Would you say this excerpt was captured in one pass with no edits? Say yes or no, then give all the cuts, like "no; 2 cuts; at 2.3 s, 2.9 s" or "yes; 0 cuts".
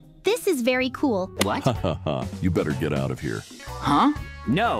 no; 1 cut; at 1.3 s